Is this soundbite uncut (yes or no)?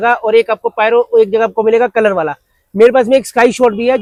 yes